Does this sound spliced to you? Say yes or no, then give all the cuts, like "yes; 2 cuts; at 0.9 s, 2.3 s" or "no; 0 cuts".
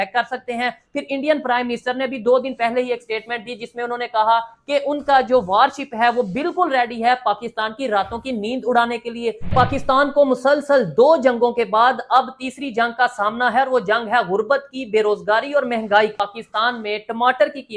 yes; 2 cuts; at 9.5 s, 16.2 s